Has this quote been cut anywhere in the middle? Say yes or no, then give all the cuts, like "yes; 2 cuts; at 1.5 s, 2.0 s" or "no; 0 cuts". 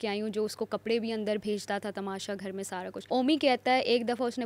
yes; 1 cut; at 3.0 s